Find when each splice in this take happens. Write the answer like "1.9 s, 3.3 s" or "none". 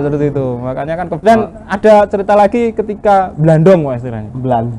1.1 s